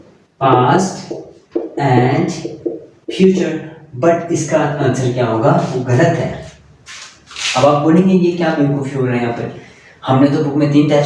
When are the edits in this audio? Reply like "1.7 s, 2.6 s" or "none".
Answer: none